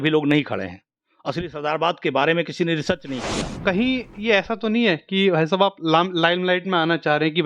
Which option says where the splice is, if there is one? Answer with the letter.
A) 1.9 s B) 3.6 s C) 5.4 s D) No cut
B